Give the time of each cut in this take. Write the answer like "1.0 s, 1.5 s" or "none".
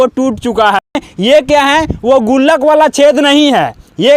1.0 s